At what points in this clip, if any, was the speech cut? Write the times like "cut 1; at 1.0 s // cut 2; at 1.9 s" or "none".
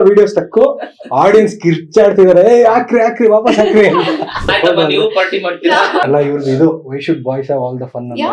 cut 1; at 4.5 s // cut 2; at 6.0 s